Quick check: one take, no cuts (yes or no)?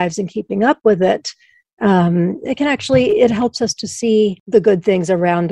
no